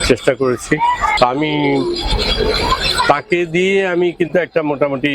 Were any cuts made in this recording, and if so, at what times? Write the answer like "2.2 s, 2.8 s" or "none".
1.1 s